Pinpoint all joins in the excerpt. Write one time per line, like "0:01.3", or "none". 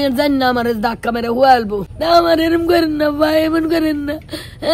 0:01.9